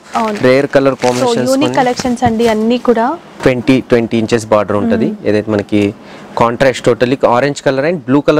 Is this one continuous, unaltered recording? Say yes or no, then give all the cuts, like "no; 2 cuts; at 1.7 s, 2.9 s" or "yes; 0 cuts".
no; 1 cut; at 3.3 s